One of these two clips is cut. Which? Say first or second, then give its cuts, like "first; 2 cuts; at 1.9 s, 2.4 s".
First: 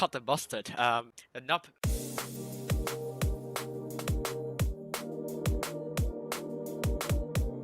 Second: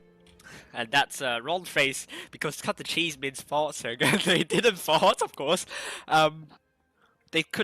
first; 1 cut; at 4.8 s